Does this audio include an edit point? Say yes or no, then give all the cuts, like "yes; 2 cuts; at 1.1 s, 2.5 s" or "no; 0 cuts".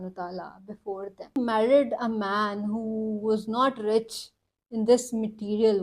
yes; 1 cut; at 1.4 s